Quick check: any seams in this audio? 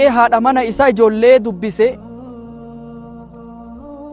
no; 0 cuts

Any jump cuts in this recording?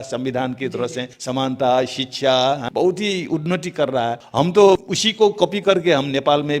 yes; 4 cuts; at 1.1 s, 2.6 s, 4.2 s, 5.0 s

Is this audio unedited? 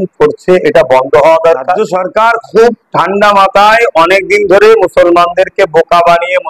no; 1 cut; at 1.8 s

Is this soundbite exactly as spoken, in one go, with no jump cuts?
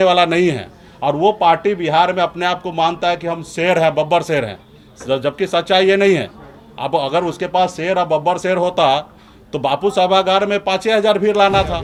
yes; 0 cuts

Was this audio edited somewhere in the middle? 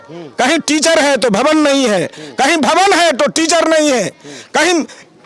no; 0 cuts

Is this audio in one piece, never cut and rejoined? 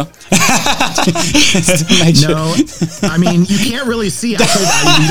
yes; 0 cuts

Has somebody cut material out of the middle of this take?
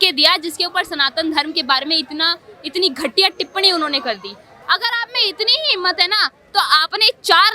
yes; 1 cut; at 4.5 s

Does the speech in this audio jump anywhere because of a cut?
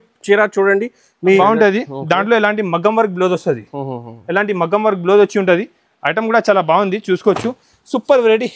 yes; 1 cut; at 1.4 s

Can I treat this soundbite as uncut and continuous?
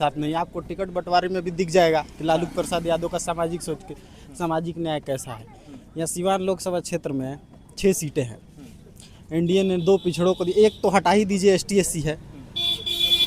yes; 0 cuts

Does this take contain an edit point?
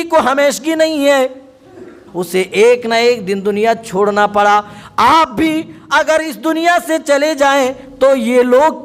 yes; 1 cut; at 2.0 s

